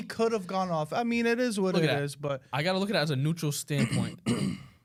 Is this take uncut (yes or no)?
yes